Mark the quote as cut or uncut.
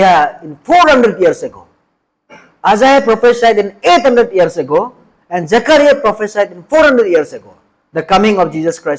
uncut